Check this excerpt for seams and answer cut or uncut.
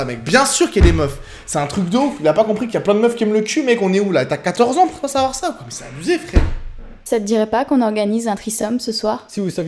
uncut